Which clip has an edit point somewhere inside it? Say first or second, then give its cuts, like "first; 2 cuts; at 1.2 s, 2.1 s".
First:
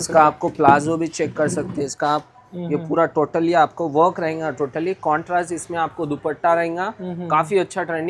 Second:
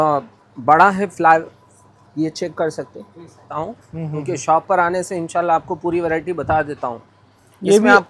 second; 1 cut; at 3.5 s